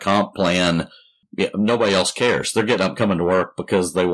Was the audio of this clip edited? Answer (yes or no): yes